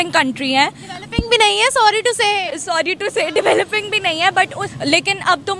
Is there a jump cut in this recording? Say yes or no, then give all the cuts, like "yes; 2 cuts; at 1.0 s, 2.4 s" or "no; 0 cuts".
yes; 1 cut; at 4.6 s